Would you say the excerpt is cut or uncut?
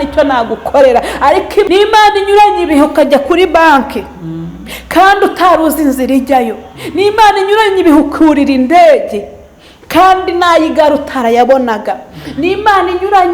cut